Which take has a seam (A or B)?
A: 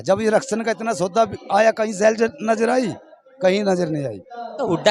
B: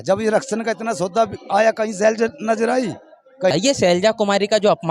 B